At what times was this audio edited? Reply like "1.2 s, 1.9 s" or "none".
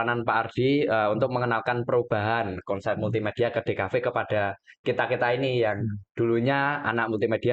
none